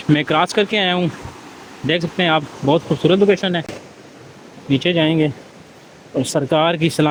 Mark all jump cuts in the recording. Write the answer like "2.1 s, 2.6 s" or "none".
none